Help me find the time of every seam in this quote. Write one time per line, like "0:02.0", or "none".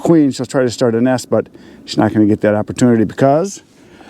none